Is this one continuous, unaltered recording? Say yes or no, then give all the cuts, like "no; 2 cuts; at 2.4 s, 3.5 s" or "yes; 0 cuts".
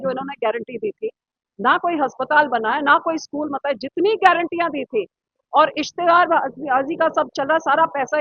yes; 0 cuts